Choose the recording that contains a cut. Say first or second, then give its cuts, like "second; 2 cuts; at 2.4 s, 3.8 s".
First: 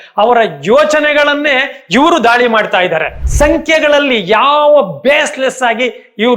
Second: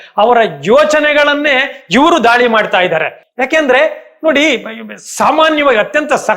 first; 1 cut; at 3.2 s